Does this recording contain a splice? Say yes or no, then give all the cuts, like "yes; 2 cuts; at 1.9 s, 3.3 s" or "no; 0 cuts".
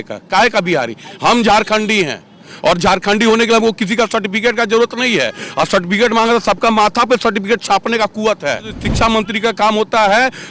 yes; 1 cut; at 8.8 s